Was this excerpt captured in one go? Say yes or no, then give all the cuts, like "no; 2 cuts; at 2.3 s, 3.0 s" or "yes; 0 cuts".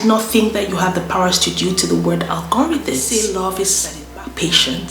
no; 1 cut; at 3.0 s